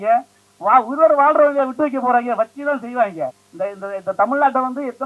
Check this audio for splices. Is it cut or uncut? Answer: cut